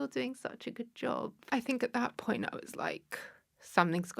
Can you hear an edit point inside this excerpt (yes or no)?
yes